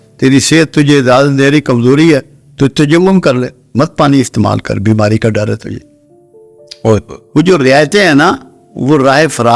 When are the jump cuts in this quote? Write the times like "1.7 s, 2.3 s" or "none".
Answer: none